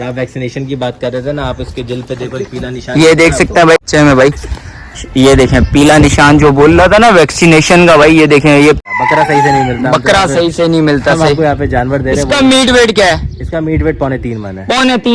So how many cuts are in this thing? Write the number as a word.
two